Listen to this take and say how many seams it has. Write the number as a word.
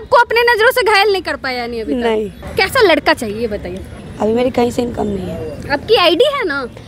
two